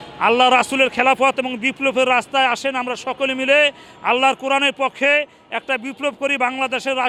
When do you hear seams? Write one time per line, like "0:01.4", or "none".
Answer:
none